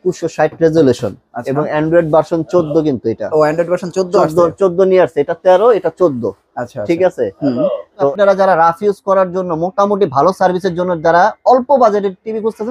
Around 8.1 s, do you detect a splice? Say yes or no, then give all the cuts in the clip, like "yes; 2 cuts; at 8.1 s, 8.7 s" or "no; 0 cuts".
yes; 1 cut; at 8.1 s